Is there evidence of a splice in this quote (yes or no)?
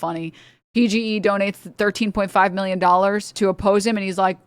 yes